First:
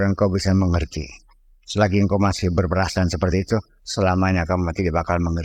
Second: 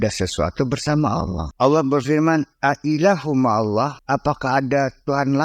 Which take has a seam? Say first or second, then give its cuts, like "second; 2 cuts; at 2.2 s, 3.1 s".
second; 2 cuts; at 1.4 s, 4.0 s